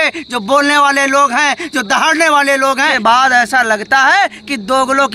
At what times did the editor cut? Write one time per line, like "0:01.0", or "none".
0:02.9